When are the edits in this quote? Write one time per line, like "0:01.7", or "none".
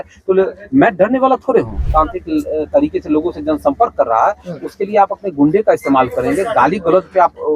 0:01.8